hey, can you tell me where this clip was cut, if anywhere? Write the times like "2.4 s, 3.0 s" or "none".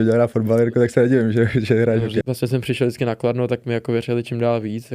2.2 s

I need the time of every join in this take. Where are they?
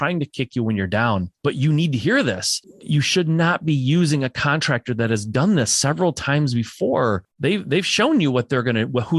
1.3 s, 2.7 s, 7.3 s

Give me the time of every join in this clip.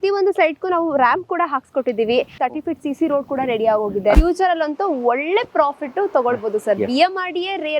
2.4 s, 4.2 s

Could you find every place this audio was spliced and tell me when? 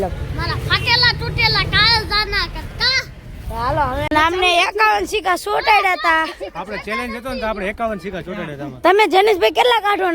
4.1 s

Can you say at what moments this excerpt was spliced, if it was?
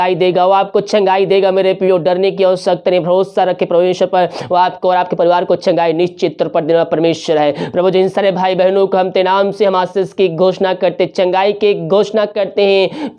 none

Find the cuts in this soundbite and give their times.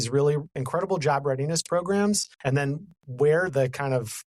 2.3 s

